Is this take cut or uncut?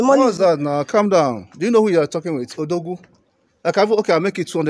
uncut